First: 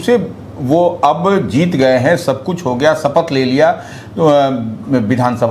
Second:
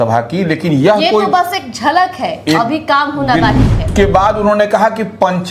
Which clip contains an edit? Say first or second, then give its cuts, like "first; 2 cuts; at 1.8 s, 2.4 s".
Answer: second; 1 cut; at 3.9 s